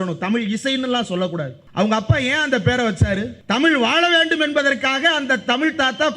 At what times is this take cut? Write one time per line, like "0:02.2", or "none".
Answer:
0:01.6
0:03.3